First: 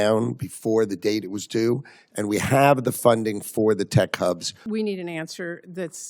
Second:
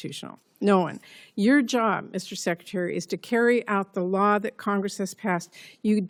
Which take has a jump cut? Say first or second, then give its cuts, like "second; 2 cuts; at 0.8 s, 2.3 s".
first; 1 cut; at 4.5 s